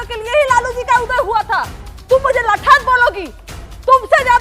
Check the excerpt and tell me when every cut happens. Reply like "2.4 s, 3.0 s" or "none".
none